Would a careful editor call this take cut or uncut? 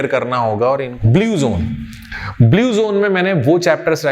cut